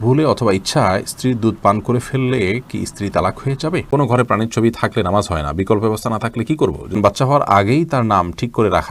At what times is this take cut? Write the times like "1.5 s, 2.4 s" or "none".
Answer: 3.9 s, 7.0 s